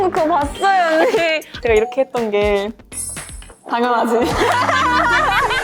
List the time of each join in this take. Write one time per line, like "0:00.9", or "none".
none